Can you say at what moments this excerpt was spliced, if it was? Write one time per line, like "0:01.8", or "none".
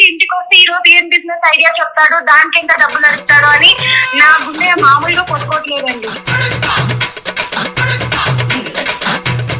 0:06.2